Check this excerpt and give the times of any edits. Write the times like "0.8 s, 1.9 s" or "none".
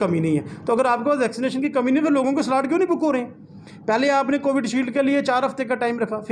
none